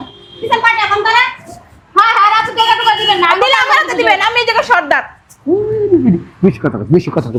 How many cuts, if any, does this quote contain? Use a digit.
0